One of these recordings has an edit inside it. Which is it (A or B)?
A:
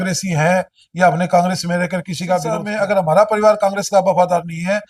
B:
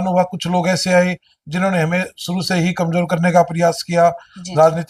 A